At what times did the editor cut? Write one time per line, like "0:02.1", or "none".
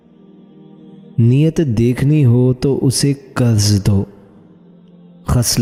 none